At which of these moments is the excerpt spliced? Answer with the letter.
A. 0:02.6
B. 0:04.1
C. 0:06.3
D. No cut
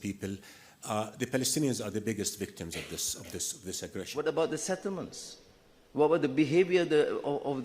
B